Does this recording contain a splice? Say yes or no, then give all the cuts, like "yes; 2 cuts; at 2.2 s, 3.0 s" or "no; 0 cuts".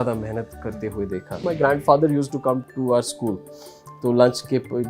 yes; 1 cut; at 1.4 s